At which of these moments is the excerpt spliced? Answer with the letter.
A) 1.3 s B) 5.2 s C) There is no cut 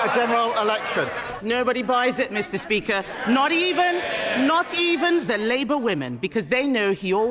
A